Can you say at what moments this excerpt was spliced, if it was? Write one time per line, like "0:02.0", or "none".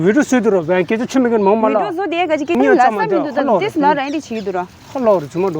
0:02.5